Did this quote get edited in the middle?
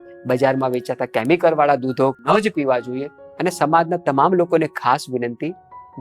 yes; 2 cuts; at 2.2 s, 3.2 s

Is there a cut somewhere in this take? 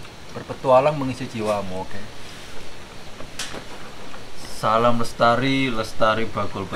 no; 0 cuts

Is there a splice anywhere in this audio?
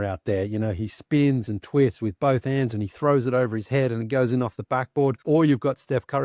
yes; 1 cut; at 5.2 s

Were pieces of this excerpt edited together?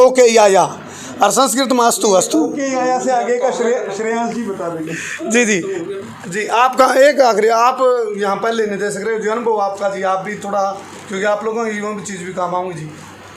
no; 0 cuts

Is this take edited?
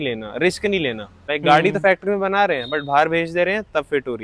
yes; 1 cut; at 1.3 s

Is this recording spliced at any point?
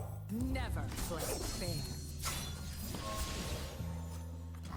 no; 0 cuts

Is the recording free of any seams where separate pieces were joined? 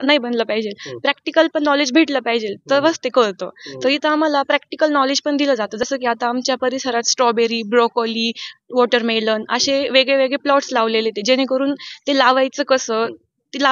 yes; 0 cuts

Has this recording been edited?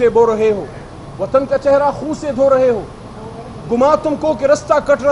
no; 0 cuts

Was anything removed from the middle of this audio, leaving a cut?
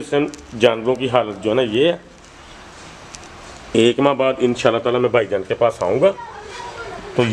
no; 0 cuts

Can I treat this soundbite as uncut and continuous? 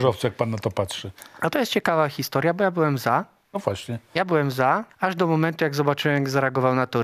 no; 1 cut; at 4.9 s

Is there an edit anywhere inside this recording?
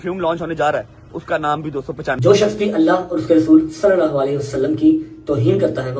yes; 1 cut; at 2.1 s

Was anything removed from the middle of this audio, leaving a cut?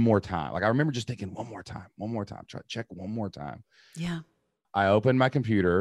yes; 1 cut; at 4.7 s

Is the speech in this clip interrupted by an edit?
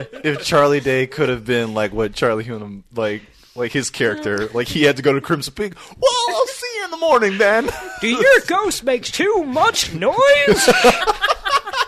no; 0 cuts

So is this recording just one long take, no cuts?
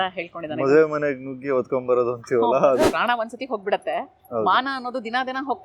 no; 1 cut; at 2.9 s

